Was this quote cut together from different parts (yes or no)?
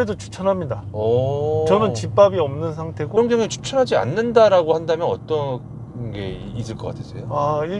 yes